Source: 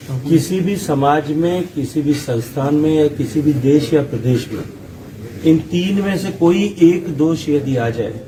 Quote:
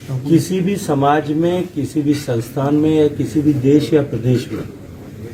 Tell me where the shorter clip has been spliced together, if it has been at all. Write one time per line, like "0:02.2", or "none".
none

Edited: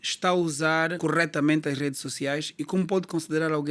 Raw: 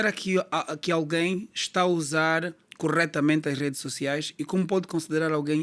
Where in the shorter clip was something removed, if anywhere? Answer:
0:00.9

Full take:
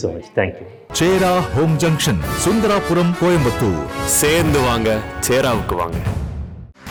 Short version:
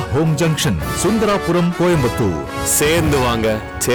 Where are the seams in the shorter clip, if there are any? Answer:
none

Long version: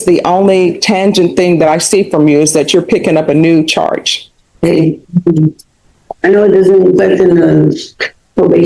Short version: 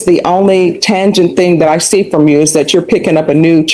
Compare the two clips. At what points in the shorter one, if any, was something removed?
none

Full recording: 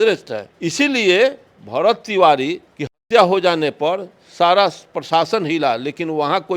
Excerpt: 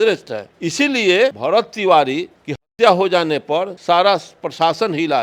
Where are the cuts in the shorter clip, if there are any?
0:01.4
0:03.7

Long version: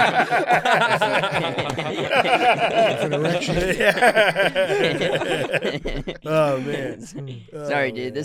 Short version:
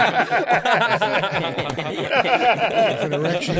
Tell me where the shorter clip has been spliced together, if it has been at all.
none

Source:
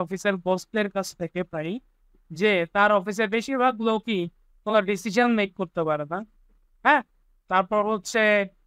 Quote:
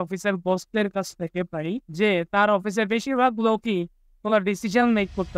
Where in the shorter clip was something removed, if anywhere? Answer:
0:01.9

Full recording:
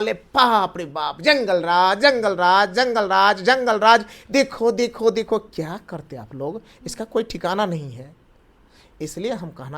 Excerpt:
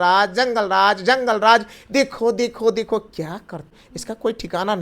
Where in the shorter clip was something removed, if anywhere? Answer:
0:03.8

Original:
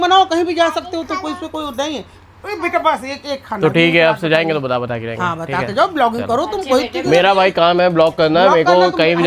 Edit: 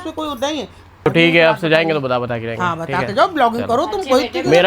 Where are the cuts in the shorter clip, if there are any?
0:01.1

